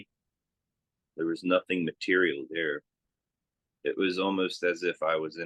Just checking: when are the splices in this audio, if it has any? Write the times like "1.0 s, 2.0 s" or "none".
none